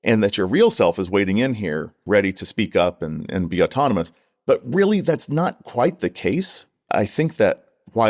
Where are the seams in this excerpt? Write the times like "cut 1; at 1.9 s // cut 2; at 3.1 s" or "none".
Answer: cut 1; at 2.0 s // cut 2; at 6.8 s